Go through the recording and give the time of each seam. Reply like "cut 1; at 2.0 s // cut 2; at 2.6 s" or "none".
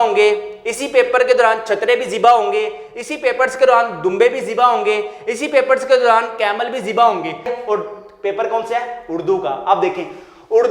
cut 1; at 7.5 s